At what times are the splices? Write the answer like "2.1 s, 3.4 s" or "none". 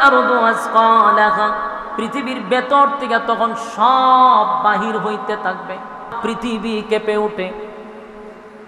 6.2 s

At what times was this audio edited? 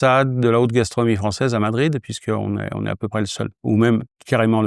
3.6 s

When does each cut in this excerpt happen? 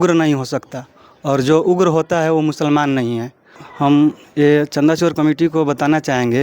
3.6 s

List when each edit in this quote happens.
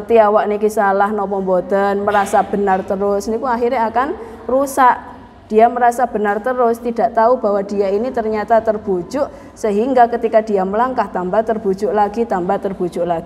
none

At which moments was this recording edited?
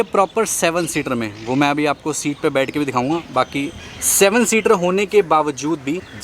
none

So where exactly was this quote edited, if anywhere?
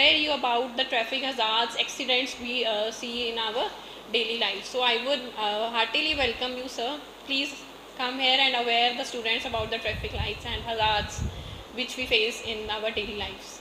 none

